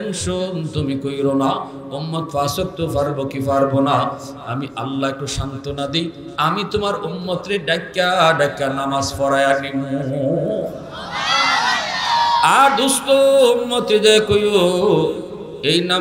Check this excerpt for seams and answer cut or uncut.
uncut